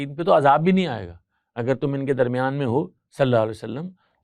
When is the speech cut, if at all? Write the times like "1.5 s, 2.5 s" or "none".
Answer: none

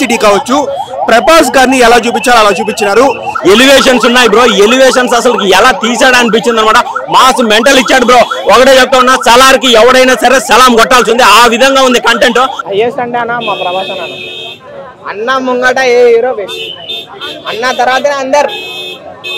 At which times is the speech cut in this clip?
3.3 s, 12.6 s

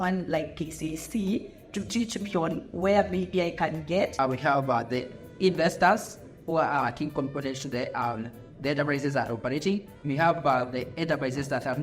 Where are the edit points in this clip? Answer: 4.1 s

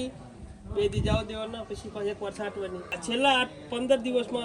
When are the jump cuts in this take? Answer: 2.9 s

